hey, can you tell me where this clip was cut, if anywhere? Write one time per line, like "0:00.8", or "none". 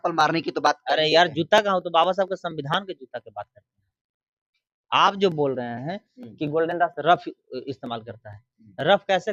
none